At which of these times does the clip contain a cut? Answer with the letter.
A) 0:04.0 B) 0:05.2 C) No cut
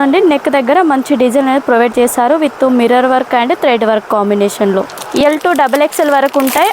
B